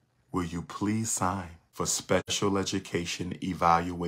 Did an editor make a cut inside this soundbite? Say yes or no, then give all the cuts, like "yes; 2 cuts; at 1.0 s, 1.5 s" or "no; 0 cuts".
yes; 1 cut; at 1.6 s